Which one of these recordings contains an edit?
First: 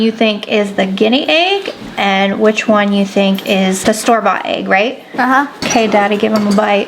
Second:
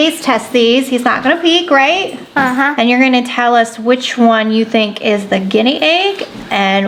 first; 1 cut; at 3.8 s

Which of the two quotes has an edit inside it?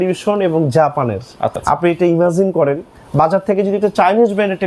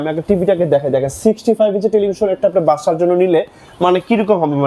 first; 1 cut; at 1.5 s

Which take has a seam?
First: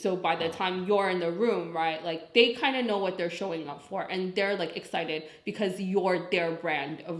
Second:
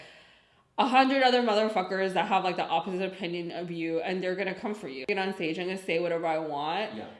second; 1 cut; at 5.1 s

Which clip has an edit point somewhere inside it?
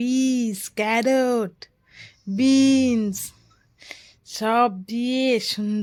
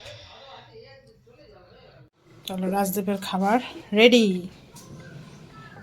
second; 1 cut; at 2.1 s

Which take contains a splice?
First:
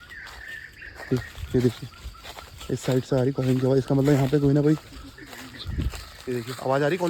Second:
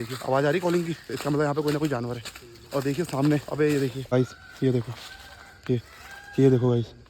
second; 1 cut; at 4.0 s

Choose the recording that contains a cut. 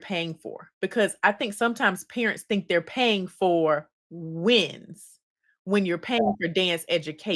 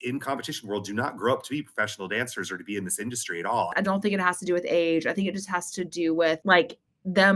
second; 1 cut; at 3.7 s

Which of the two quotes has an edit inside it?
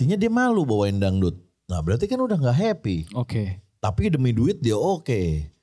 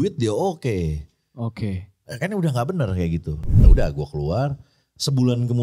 second; 1 cut; at 3.5 s

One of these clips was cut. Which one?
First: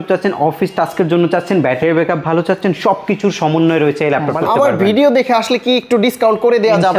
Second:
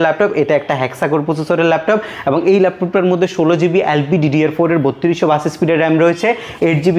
first; 1 cut; at 4.4 s

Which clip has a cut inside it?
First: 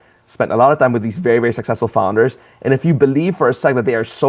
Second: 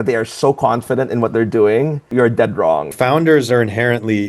second; 2 cuts; at 2.0 s, 2.9 s

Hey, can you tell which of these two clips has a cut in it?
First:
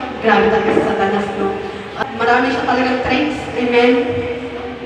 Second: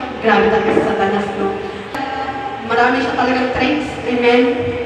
first; 1 cut; at 2.0 s

